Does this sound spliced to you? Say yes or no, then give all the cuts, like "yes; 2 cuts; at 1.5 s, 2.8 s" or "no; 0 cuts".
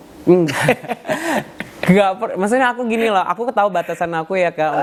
no; 0 cuts